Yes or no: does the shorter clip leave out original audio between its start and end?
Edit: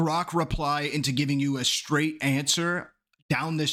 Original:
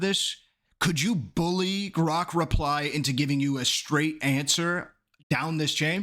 no